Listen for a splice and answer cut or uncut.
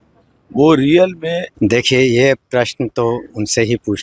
cut